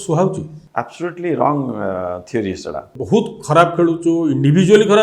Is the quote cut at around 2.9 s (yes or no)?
yes